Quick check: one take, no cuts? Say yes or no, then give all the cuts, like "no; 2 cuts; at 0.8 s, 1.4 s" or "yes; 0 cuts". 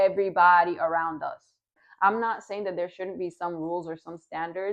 no; 1 cut; at 1.7 s